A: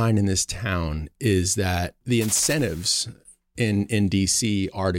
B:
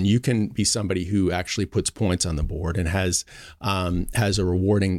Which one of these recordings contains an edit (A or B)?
A